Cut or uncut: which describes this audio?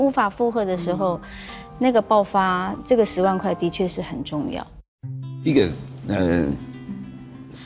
cut